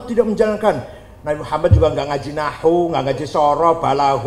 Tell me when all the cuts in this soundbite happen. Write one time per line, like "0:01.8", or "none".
none